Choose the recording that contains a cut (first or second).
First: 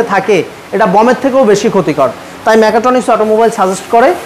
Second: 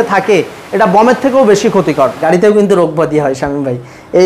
second